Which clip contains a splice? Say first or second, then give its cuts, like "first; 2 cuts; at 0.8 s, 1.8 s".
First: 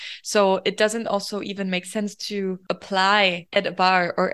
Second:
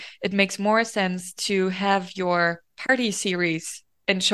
first; 2 cuts; at 2.6 s, 3.4 s